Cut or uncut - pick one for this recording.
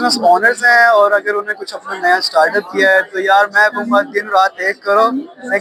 uncut